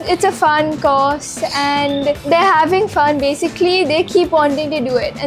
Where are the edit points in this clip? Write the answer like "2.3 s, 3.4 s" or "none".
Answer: none